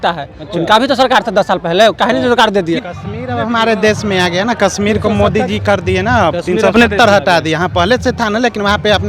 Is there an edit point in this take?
yes; 1 cut; at 2.8 s

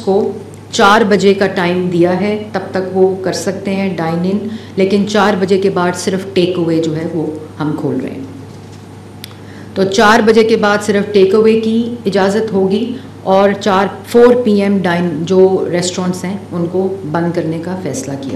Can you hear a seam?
no; 0 cuts

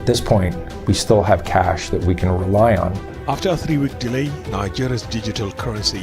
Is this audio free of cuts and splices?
no; 1 cut; at 3.1 s

